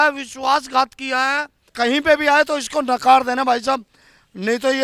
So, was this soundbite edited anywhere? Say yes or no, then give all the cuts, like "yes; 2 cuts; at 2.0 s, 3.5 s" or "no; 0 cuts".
yes; 1 cut; at 1.6 s